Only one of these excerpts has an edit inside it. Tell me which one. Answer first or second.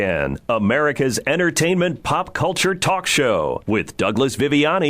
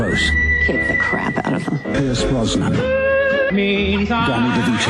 first